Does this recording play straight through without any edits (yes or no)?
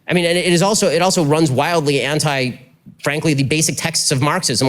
no